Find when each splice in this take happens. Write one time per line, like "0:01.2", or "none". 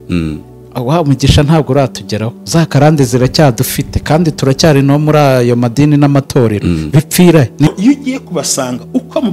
0:07.7